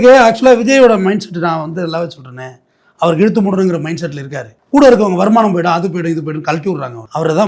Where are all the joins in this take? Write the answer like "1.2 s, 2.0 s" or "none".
none